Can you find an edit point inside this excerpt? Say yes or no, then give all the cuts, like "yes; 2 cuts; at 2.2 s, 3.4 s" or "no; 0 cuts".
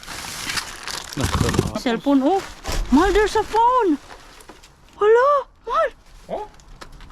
yes; 1 cut; at 1.8 s